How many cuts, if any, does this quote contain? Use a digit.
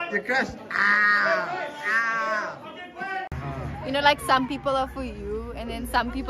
1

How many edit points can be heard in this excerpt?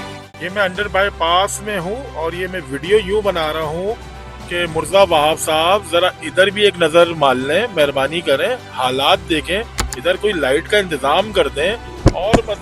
1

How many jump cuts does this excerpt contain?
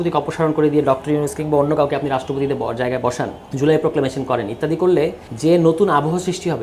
2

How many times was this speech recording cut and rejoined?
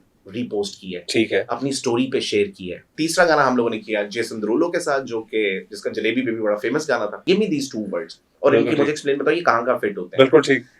2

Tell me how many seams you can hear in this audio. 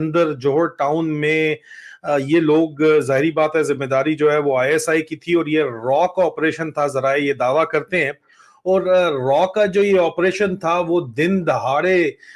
0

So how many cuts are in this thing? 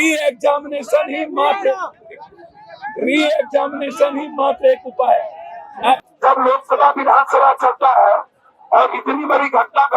1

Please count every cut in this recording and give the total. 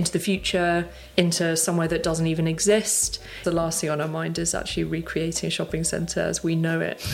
1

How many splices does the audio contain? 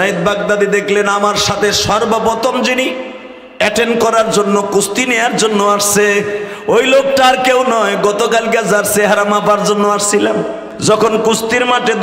1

